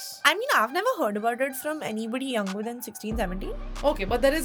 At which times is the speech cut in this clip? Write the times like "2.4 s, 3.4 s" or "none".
none